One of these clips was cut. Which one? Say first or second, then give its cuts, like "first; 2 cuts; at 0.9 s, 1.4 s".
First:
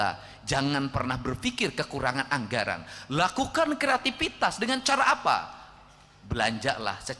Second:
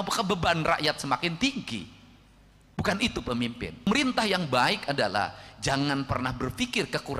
second; 1 cut; at 3.9 s